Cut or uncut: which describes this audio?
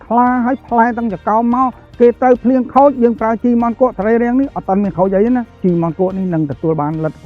cut